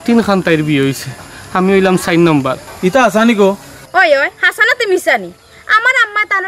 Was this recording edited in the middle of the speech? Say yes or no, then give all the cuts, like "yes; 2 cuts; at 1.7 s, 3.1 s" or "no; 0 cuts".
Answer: yes; 1 cut; at 2.7 s